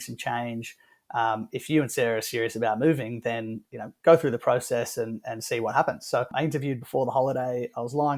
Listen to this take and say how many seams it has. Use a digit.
1